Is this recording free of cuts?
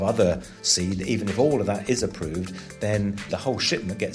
no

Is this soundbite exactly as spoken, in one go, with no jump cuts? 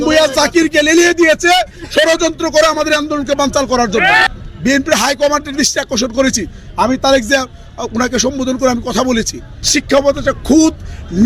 no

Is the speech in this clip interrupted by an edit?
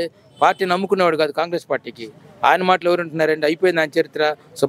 no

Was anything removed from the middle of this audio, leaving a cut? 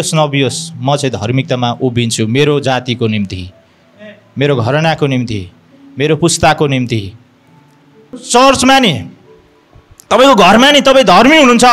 yes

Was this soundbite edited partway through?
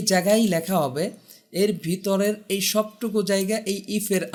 no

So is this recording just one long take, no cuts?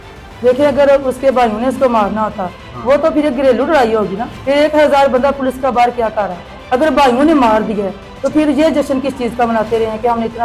yes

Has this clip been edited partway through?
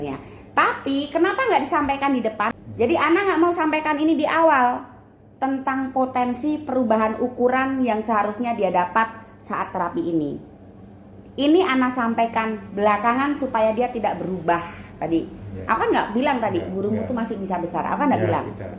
yes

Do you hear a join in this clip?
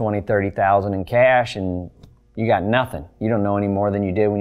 no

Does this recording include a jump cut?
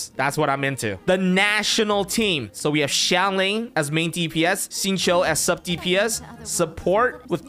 no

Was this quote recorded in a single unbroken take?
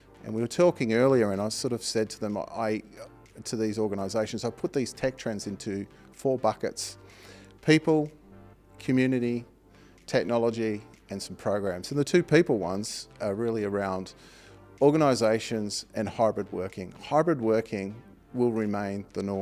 yes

